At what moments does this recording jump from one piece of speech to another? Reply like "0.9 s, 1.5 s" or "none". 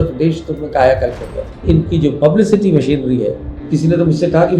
1.6 s, 3.5 s